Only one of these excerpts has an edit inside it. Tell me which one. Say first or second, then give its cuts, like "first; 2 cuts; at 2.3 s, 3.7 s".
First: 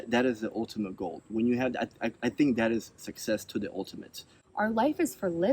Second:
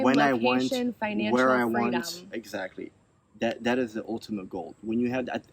first; 1 cut; at 4.4 s